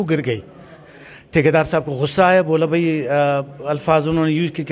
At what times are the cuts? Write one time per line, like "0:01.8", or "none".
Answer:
none